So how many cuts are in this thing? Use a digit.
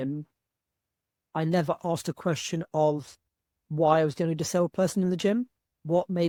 0